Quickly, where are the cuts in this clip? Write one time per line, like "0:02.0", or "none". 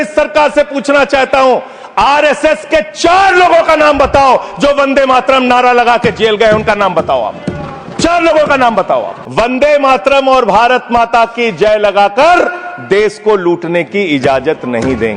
0:09.2

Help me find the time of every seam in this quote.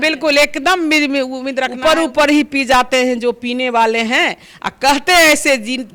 0:01.7

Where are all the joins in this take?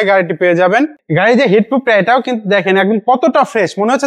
0:01.0

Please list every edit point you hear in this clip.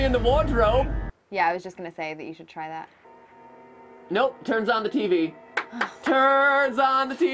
0:01.1

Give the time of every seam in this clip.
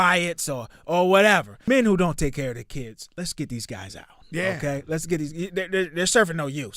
0:01.5

